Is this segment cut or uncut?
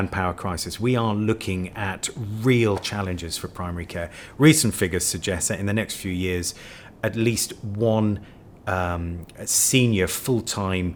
uncut